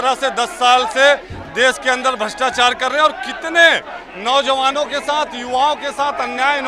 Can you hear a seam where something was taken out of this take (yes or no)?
no